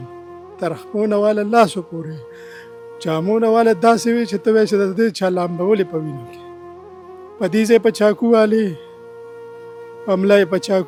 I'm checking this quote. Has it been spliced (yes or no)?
no